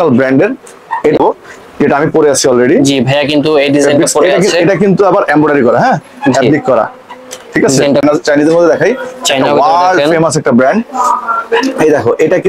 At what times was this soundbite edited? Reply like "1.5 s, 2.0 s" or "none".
1.2 s, 8.0 s